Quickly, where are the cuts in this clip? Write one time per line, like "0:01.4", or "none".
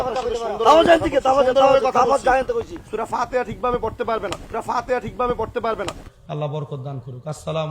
0:06.0

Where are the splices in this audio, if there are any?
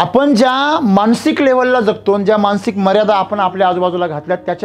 none

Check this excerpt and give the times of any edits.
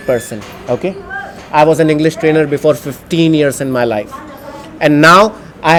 none

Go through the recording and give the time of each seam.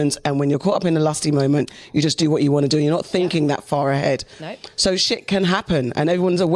none

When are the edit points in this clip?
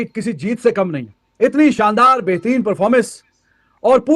none

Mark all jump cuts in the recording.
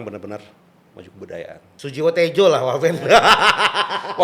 0:01.7

